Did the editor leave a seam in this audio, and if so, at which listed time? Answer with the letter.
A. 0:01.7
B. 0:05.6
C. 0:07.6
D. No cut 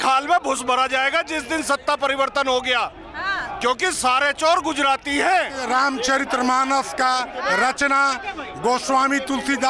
B